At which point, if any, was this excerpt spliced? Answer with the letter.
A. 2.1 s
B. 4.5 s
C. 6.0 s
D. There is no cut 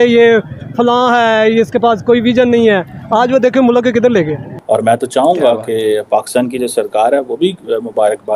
B